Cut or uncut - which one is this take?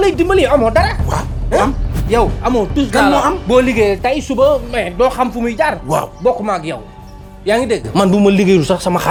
uncut